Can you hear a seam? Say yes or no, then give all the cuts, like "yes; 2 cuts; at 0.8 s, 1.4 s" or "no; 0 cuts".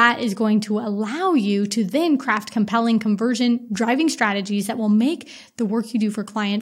no; 0 cuts